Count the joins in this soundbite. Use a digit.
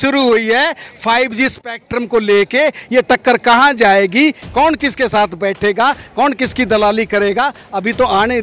0